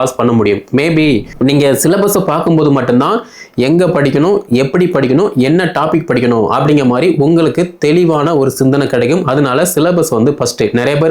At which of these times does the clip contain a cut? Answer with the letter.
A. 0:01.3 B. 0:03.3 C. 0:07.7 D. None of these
A